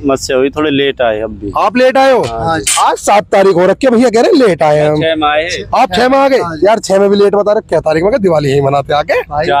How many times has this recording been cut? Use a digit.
0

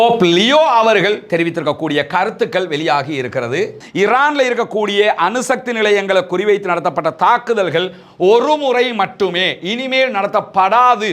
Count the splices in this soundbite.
1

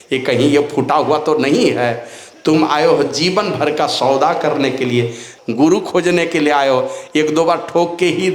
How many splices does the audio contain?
1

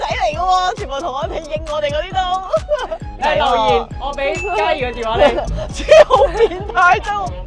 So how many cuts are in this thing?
0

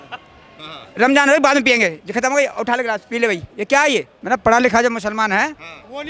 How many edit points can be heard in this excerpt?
1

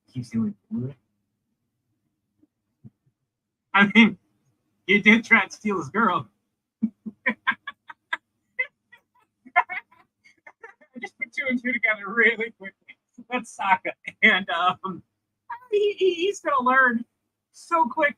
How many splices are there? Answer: 0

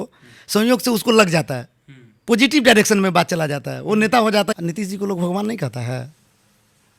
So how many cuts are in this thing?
1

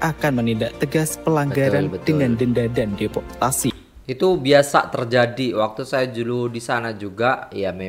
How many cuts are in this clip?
0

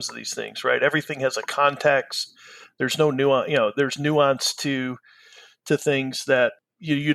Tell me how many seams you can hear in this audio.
0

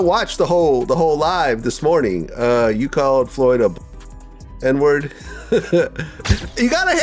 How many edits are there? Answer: 1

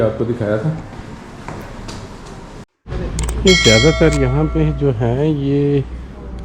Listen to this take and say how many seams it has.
1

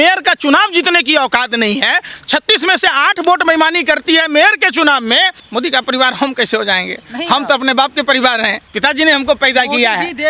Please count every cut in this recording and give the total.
1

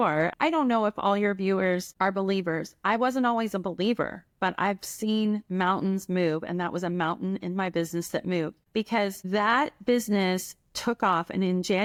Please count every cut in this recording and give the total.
0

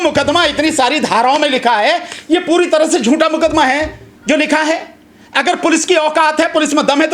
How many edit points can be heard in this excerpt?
0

